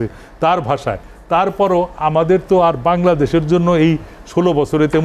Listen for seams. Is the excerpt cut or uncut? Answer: uncut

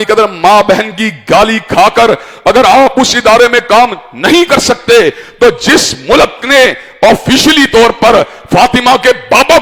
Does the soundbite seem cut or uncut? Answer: uncut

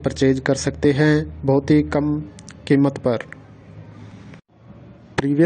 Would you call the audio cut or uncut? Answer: cut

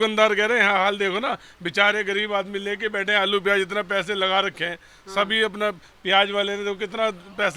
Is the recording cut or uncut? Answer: uncut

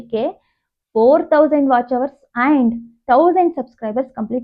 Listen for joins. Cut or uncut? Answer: uncut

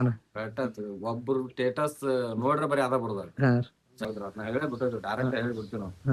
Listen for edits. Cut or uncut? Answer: cut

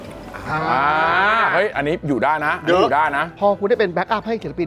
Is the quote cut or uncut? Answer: cut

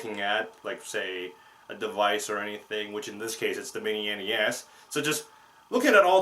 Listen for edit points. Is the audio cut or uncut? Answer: uncut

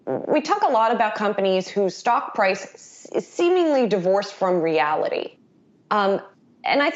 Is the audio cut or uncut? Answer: uncut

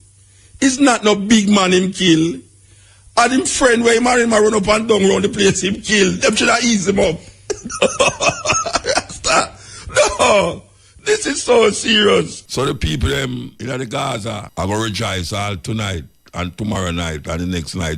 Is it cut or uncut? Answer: cut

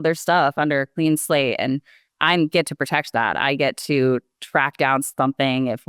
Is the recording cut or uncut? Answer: cut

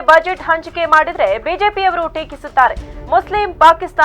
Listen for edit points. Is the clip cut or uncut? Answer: uncut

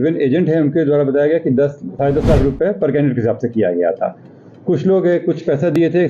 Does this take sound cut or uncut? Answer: uncut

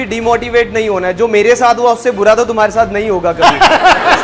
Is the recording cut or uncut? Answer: uncut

